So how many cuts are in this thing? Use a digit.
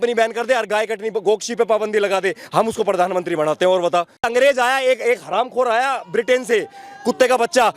1